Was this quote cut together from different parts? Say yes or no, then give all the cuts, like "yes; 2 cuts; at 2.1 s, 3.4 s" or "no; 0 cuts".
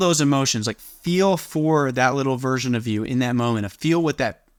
no; 0 cuts